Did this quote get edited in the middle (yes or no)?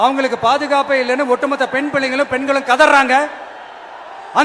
no